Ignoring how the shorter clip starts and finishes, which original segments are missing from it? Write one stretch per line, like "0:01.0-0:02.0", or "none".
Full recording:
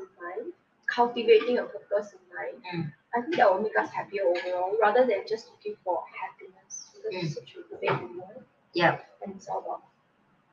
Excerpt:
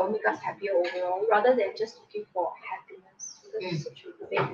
none